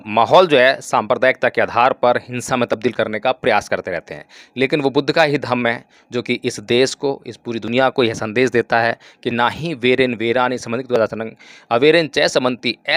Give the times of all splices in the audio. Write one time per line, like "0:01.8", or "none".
none